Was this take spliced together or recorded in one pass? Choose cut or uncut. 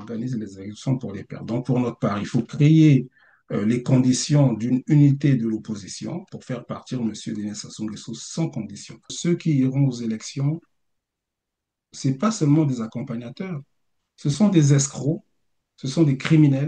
cut